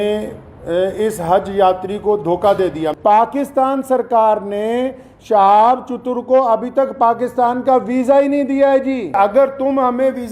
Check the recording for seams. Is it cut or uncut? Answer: cut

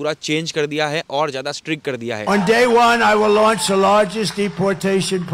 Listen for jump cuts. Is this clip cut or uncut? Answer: cut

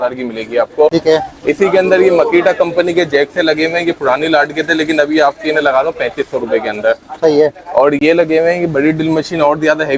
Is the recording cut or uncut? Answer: uncut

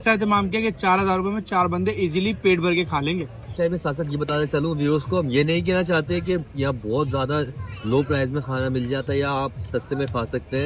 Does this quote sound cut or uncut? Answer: uncut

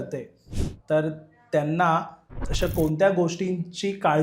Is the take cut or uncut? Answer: cut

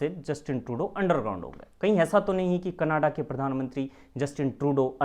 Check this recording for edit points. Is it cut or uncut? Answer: cut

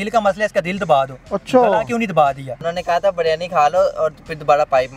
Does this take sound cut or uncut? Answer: cut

